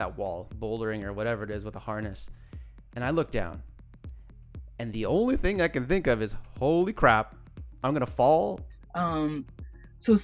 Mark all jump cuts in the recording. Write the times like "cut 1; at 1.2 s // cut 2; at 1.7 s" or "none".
cut 1; at 8.6 s